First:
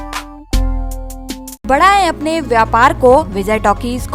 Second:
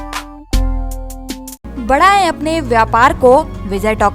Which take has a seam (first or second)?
first